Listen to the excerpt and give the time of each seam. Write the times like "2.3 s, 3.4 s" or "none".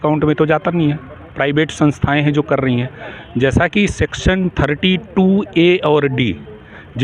none